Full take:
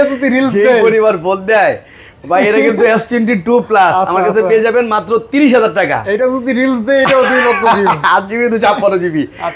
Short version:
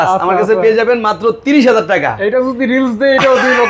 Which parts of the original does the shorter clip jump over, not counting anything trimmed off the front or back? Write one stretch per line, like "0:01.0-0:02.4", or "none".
none